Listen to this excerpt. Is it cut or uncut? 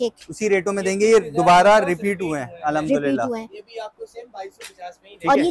uncut